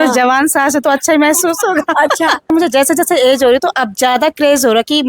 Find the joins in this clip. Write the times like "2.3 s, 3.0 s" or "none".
2.5 s